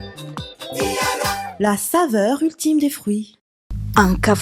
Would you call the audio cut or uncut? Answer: cut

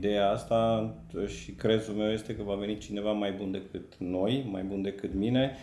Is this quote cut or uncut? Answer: uncut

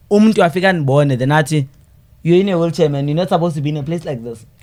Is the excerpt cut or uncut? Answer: uncut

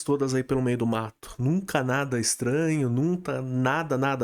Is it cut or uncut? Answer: uncut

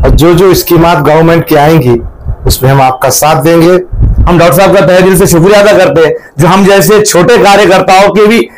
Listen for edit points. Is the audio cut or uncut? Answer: cut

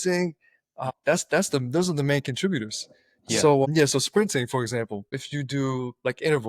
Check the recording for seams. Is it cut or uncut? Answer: uncut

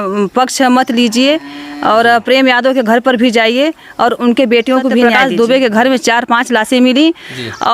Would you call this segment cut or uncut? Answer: cut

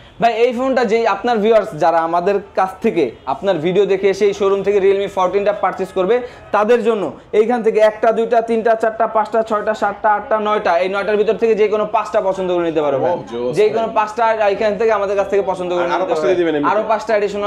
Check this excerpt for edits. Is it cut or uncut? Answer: uncut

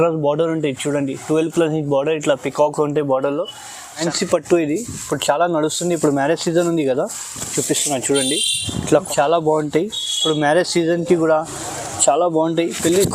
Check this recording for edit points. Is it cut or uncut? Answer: cut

